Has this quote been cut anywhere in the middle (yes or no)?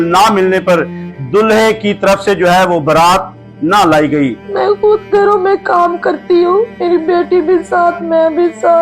yes